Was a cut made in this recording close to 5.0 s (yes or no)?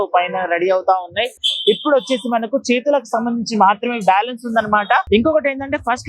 yes